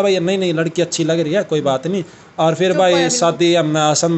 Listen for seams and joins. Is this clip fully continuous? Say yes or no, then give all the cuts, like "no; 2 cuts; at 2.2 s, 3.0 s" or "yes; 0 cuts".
yes; 0 cuts